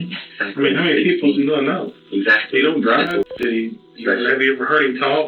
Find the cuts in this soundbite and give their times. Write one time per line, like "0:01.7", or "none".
0:03.2